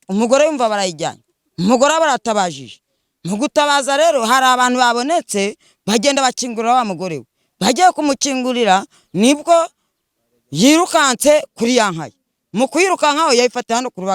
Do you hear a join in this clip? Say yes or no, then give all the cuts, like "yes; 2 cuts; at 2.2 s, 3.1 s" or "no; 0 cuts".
no; 0 cuts